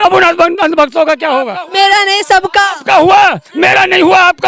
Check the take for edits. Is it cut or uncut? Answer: cut